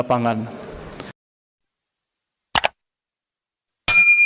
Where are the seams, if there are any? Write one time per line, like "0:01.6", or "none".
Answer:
0:01.1